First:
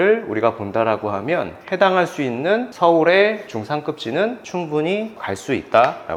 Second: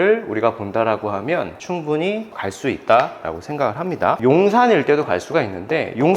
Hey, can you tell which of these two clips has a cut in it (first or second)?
second